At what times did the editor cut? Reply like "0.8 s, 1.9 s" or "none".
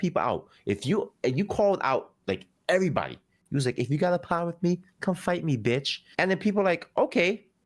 6.0 s